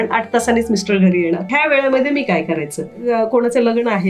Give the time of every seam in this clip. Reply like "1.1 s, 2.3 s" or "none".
1.5 s, 3.0 s